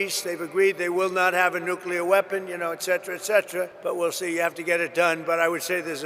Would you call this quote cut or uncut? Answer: cut